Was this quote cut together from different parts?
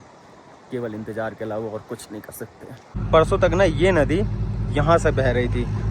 yes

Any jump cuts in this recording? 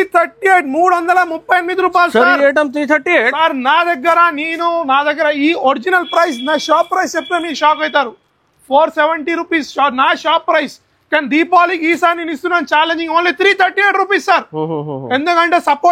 no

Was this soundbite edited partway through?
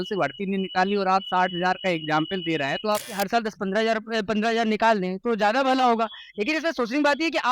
yes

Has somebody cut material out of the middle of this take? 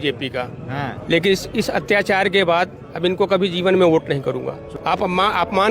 yes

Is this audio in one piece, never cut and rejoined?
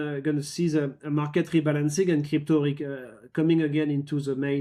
yes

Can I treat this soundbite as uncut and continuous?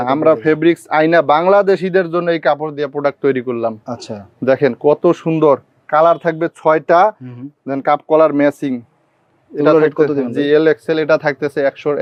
yes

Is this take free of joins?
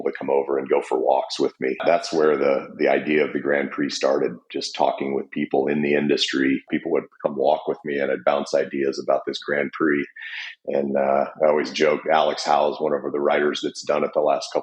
no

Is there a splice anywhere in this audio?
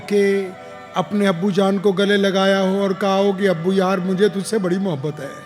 no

